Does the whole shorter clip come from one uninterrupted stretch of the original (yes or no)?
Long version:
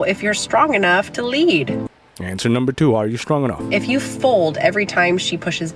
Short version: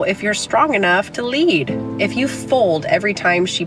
no